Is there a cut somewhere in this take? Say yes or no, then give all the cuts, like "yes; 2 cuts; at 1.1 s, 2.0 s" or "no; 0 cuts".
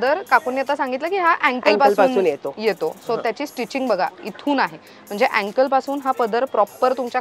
no; 0 cuts